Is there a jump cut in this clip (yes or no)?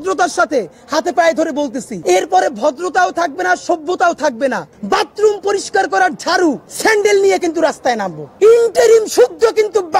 yes